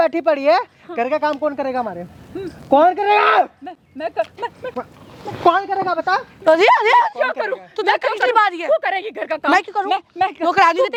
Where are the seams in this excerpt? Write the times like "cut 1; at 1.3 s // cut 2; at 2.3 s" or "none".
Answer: none